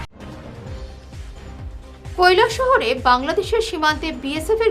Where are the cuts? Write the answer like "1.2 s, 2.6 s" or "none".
2.1 s